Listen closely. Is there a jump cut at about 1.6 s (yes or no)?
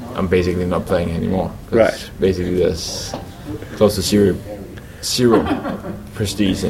no